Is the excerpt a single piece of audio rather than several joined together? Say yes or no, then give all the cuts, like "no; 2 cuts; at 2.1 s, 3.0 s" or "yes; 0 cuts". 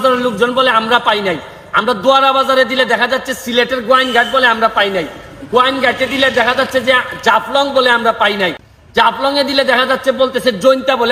yes; 0 cuts